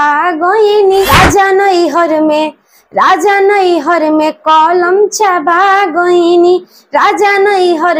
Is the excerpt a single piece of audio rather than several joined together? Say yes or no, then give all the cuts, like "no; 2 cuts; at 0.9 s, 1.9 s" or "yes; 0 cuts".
no; 1 cut; at 1.1 s